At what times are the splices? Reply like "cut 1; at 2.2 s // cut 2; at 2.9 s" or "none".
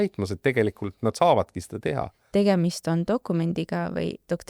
cut 1; at 2.1 s